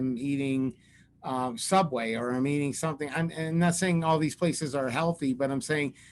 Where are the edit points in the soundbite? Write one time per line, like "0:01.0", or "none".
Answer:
none